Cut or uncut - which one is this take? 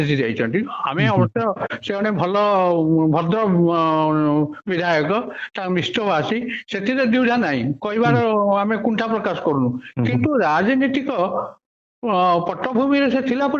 uncut